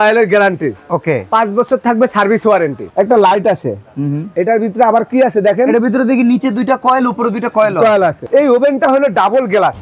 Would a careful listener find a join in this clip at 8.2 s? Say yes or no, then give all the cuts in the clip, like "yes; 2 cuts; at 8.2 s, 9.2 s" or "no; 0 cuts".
yes; 2 cuts; at 2.8 s, 8.2 s